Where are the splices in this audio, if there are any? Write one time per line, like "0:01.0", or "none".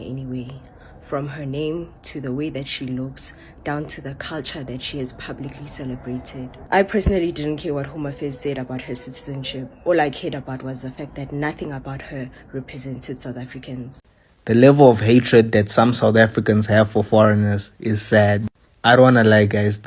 0:14.0